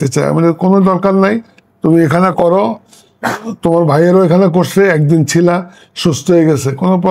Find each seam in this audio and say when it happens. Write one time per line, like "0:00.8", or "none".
none